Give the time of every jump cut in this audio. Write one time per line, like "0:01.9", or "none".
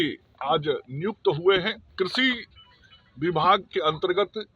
0:01.9